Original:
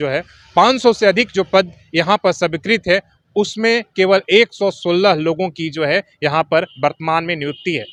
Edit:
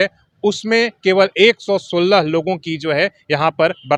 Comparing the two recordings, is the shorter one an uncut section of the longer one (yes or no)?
yes